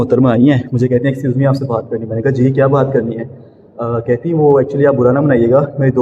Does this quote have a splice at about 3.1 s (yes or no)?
no